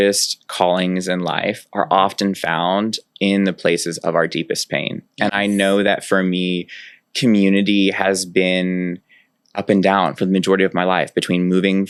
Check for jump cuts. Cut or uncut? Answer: uncut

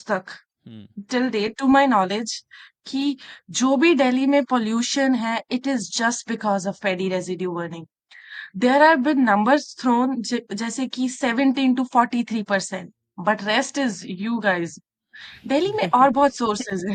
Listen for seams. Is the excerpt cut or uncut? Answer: uncut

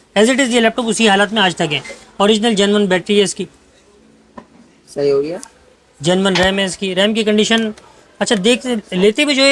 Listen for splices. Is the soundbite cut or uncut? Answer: uncut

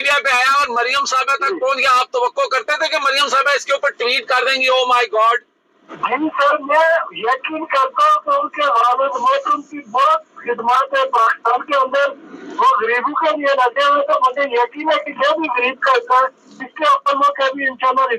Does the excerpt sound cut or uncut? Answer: uncut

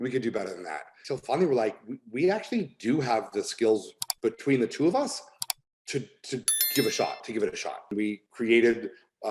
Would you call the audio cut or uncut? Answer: uncut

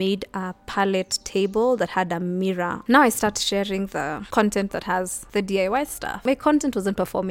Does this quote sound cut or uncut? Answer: cut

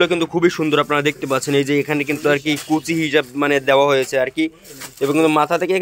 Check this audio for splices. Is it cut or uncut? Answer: uncut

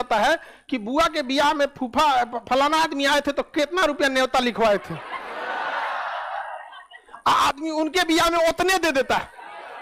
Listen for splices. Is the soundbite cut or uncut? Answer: uncut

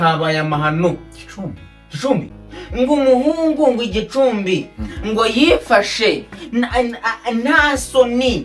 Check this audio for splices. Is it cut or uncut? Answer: cut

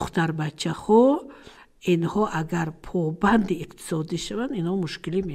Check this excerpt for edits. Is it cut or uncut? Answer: uncut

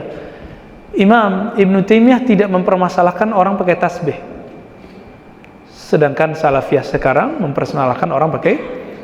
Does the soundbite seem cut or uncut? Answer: uncut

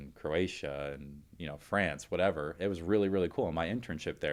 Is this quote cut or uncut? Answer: uncut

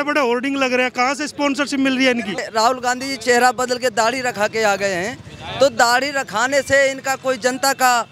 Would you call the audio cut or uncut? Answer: cut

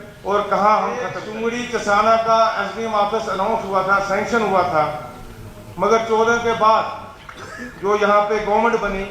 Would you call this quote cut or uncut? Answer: cut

